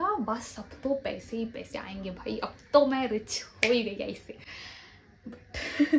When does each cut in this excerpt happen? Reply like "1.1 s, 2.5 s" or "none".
none